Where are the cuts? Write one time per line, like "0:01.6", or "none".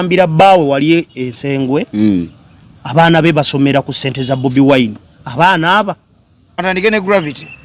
0:06.6